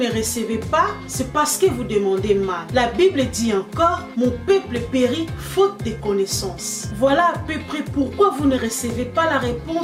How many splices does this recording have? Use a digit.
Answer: 0